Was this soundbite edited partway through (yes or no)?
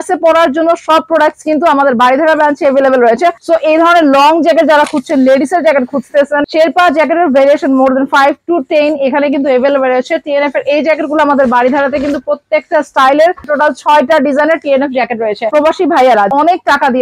yes